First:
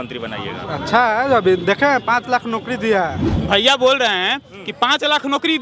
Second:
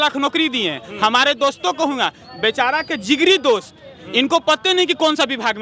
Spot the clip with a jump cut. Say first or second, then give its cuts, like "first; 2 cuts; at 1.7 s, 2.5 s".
first; 1 cut; at 3.3 s